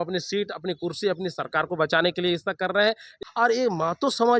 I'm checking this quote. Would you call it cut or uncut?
cut